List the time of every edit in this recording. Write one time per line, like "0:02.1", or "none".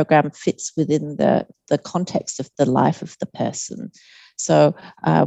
none